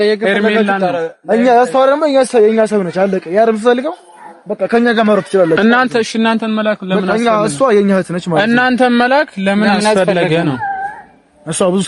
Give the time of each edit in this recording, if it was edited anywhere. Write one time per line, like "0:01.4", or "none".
none